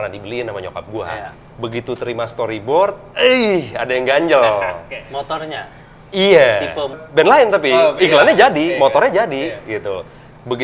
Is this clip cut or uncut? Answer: cut